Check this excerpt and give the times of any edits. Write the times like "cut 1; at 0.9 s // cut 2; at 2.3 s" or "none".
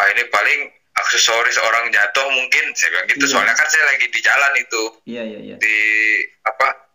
none